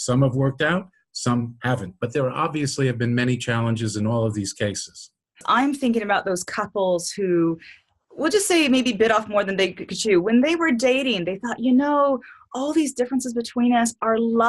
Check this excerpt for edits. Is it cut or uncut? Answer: cut